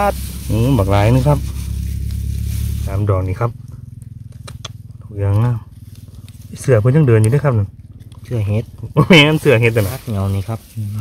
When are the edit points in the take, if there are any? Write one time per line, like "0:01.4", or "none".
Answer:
0:02.8
0:10.0